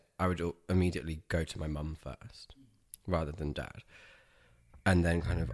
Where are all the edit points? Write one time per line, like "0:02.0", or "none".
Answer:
none